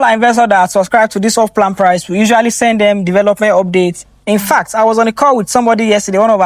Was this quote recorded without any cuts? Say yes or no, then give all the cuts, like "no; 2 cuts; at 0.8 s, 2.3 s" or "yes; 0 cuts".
yes; 0 cuts